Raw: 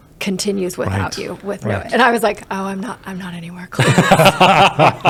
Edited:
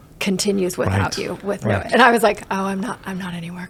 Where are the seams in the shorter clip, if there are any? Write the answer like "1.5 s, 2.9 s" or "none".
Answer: none